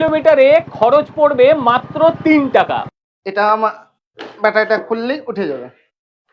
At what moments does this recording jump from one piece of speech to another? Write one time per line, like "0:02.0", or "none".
0:02.8